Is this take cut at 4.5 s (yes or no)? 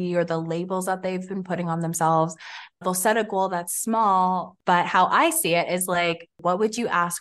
yes